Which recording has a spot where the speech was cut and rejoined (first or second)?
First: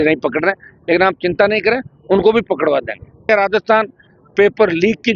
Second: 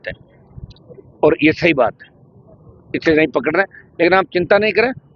first